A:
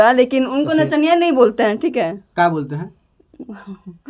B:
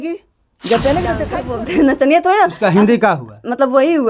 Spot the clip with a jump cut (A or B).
B